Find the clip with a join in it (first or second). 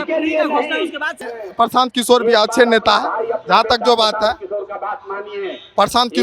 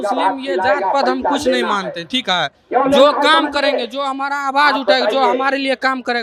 first